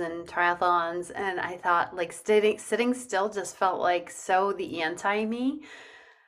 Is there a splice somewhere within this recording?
no; 0 cuts

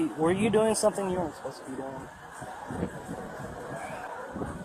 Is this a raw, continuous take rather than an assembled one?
yes; 0 cuts

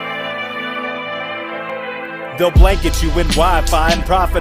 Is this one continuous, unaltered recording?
no; 1 cut; at 1.7 s

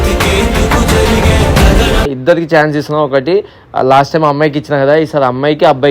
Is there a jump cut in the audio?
no; 0 cuts

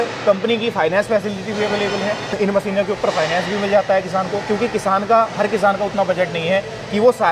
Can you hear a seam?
no; 0 cuts

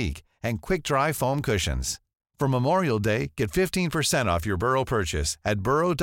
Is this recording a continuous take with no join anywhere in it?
yes; 0 cuts

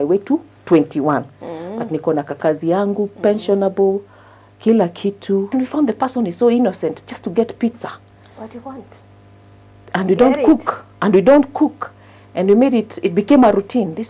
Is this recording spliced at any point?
yes; 1 cut; at 5.5 s

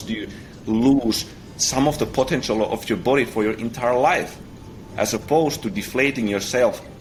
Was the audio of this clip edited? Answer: no; 0 cuts

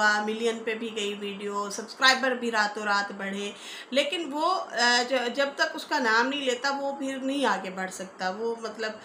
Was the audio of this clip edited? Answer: no; 0 cuts

